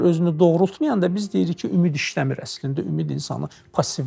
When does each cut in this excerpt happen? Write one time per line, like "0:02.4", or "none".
none